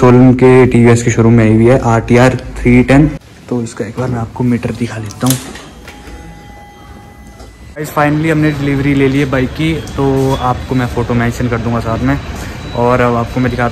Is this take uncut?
no; 2 cuts; at 3.3 s, 7.7 s

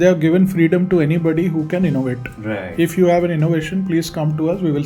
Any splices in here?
no; 0 cuts

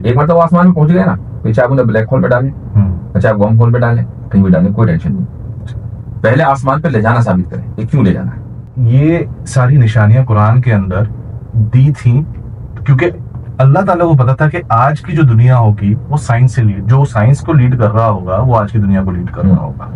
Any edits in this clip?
yes; 1 cut; at 8.7 s

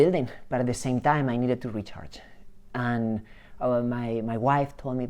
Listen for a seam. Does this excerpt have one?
no; 0 cuts

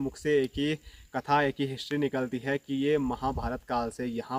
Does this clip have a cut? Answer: no; 0 cuts

